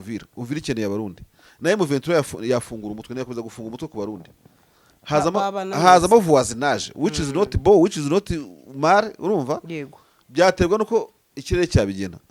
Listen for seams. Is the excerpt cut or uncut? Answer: uncut